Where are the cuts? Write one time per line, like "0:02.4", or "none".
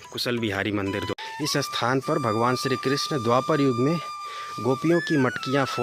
0:01.1